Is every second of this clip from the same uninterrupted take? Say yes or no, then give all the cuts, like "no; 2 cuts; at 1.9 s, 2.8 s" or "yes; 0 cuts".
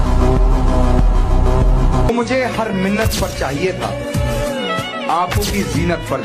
no; 1 cut; at 2.1 s